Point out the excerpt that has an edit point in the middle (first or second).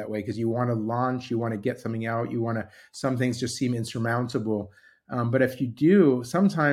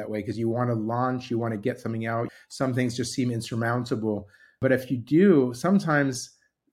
second